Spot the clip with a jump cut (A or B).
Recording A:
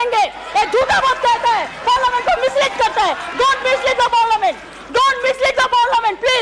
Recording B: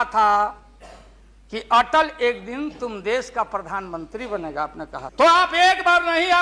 B